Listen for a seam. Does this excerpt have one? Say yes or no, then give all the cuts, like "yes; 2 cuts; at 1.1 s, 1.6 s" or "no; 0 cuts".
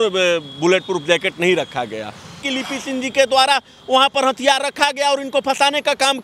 yes; 1 cut; at 2.5 s